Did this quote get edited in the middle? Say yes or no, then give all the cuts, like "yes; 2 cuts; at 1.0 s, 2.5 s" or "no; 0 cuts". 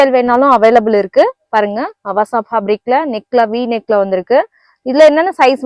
no; 0 cuts